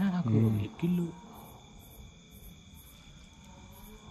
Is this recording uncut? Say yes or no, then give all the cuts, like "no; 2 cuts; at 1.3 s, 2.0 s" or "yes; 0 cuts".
yes; 0 cuts